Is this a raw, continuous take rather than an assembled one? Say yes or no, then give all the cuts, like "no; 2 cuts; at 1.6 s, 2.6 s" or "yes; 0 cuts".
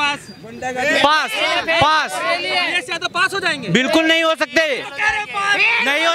yes; 0 cuts